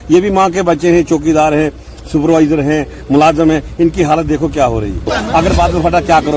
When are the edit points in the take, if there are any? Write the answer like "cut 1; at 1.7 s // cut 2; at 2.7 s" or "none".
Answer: cut 1; at 5.1 s